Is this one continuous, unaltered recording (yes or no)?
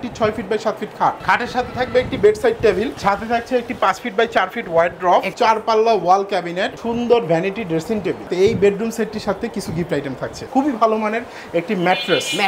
no